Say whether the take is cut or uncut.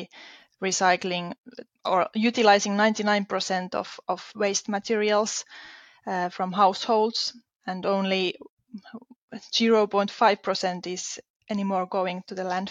uncut